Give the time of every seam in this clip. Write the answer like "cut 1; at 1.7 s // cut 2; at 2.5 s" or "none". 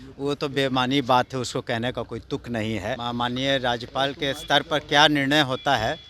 cut 1; at 3.0 s